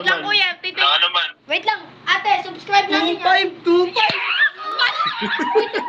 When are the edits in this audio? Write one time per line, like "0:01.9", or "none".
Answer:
none